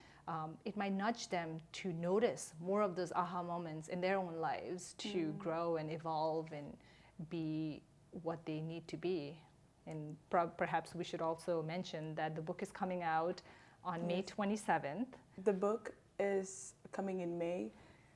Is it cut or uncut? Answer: cut